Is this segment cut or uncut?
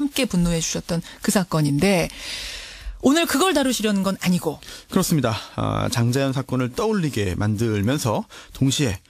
cut